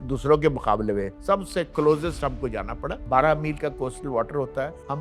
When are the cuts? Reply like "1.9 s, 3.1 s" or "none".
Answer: 1.1 s